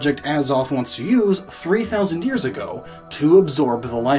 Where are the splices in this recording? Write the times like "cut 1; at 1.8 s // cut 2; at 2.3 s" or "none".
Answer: cut 1; at 2.0 s